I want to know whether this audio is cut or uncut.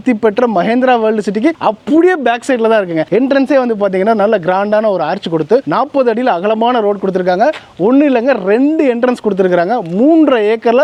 uncut